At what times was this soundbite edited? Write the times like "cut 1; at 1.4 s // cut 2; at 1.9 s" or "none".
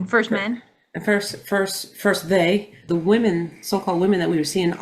cut 1; at 2.8 s